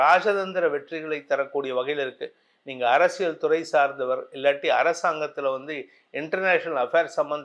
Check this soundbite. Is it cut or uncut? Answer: uncut